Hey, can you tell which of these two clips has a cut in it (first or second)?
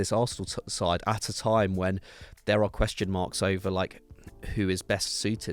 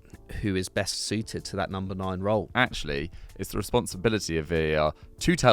second